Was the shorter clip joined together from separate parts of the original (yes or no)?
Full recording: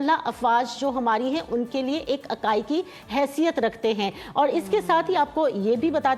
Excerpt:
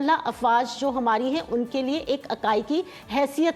no